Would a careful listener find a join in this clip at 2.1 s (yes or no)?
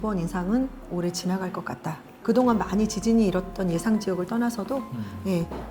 yes